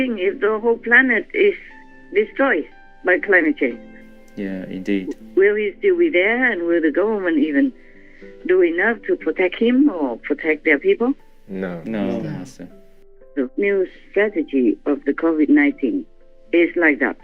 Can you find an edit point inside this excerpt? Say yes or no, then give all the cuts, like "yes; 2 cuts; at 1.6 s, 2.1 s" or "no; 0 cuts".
yes; 1 cut; at 13.2 s